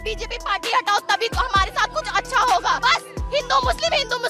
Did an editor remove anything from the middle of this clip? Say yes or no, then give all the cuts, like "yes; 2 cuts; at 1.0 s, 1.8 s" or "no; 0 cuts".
no; 0 cuts